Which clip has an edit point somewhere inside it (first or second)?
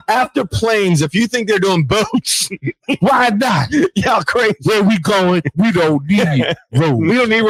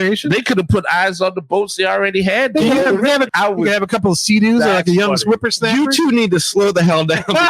second